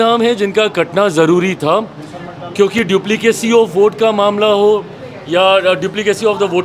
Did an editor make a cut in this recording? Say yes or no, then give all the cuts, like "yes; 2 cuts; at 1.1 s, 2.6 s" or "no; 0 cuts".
no; 0 cuts